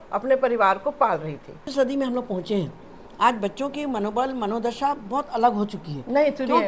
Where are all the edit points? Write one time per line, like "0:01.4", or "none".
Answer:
0:01.7

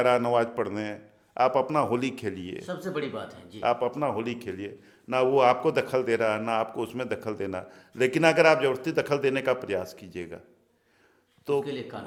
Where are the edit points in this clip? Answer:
none

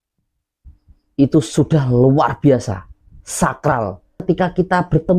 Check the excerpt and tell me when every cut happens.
0:04.2

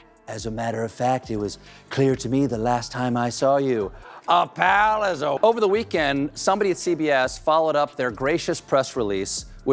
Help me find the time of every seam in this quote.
0:05.4

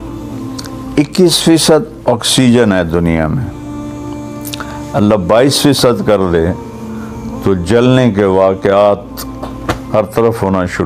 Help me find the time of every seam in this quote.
0:00.9

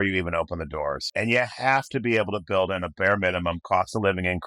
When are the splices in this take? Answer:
0:01.0

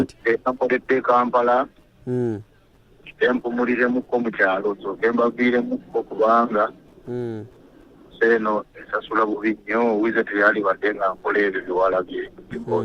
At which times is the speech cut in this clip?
none

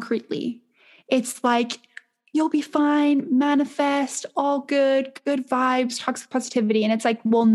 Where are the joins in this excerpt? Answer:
none

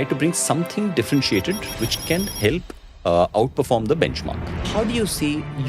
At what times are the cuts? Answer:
0:04.6

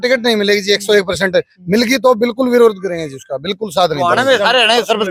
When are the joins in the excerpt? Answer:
none

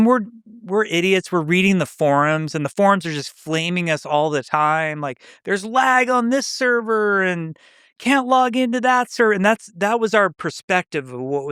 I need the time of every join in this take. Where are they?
none

